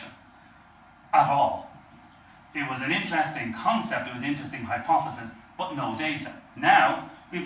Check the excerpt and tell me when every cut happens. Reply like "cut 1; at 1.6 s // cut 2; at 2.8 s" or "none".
none